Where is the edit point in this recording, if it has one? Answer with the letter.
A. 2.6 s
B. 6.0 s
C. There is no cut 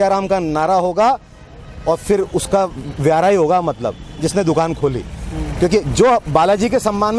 C